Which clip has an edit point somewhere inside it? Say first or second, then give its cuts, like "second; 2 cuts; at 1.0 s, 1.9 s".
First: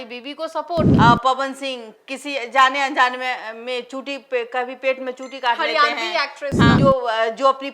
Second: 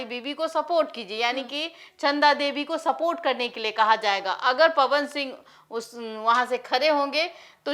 first; 2 cuts; at 0.9 s, 6.8 s